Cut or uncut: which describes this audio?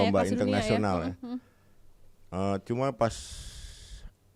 uncut